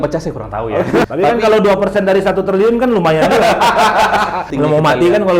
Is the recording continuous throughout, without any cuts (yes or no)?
no